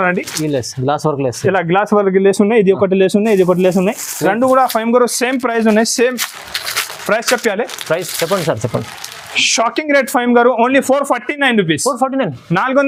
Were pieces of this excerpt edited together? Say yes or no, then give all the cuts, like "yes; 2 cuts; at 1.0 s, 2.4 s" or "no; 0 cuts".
no; 0 cuts